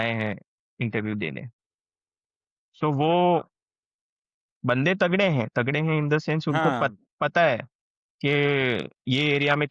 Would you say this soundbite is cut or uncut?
uncut